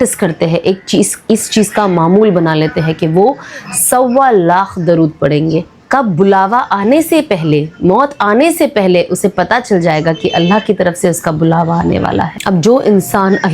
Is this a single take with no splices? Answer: no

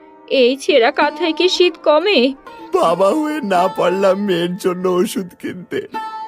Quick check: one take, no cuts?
no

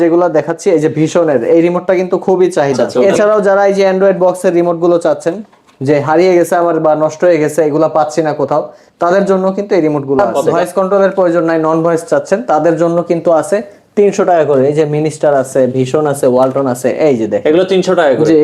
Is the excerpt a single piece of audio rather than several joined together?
no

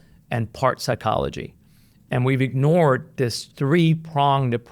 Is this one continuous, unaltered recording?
no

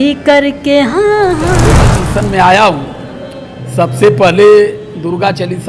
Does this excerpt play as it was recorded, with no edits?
no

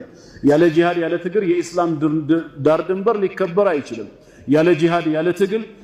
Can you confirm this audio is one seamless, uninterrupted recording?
yes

